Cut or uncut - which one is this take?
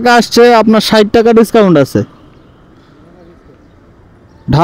uncut